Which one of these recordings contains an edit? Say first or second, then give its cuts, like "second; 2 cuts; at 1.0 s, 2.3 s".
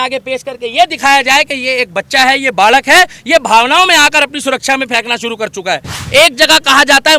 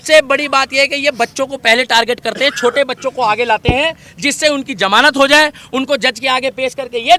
first; 1 cut; at 5.9 s